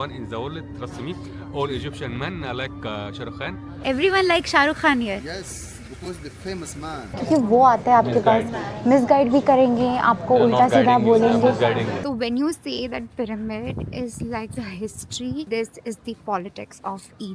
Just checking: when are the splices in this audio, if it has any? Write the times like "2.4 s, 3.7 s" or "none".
3.7 s, 7.1 s, 12.0 s, 15.5 s